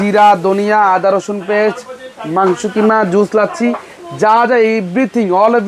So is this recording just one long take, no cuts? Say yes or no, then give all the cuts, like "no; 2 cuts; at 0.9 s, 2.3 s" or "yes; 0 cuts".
yes; 0 cuts